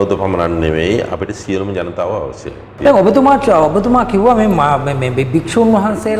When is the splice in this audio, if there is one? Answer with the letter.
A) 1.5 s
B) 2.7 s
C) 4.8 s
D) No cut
B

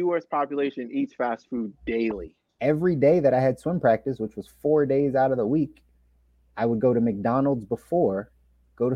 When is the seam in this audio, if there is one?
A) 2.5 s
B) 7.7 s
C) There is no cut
A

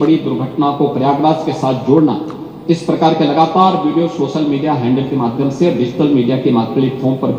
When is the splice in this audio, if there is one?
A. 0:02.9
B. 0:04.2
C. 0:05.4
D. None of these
D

